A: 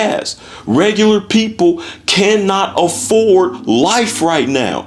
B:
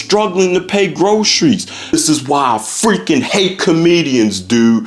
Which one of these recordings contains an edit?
B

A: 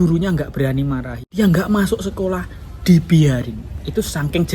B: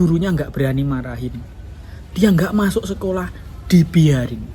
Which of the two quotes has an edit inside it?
A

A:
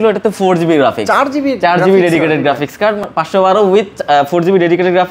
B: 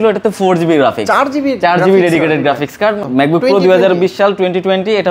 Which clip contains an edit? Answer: B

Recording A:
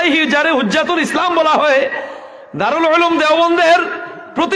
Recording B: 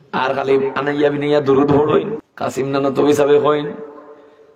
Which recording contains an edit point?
B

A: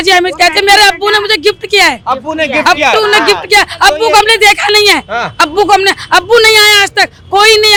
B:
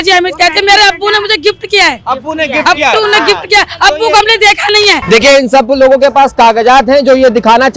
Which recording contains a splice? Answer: B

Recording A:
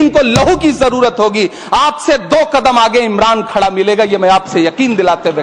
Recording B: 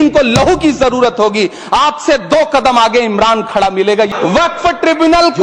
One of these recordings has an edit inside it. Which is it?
B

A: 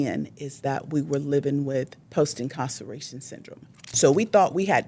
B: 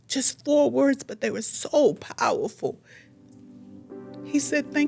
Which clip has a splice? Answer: A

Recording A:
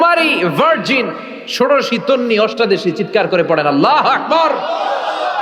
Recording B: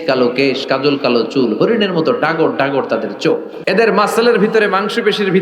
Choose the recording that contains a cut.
B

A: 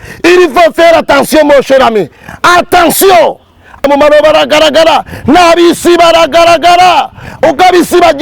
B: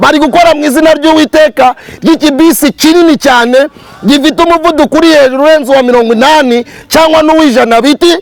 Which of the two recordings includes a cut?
A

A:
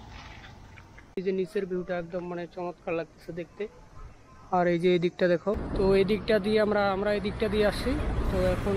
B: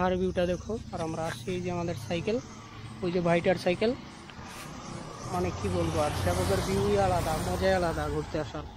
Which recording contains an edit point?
A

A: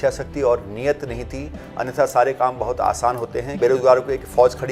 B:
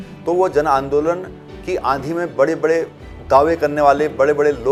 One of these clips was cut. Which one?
A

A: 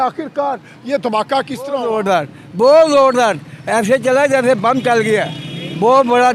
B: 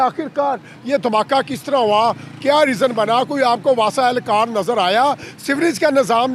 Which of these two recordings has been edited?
A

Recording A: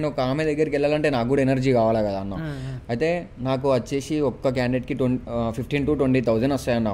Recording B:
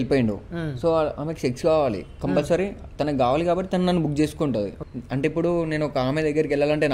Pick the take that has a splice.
B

